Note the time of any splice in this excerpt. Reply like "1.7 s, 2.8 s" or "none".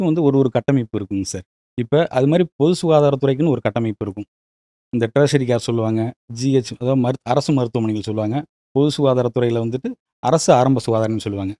none